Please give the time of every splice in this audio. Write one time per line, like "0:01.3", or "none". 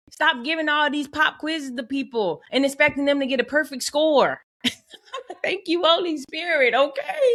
none